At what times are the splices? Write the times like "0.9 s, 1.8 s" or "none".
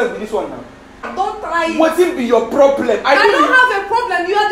1.1 s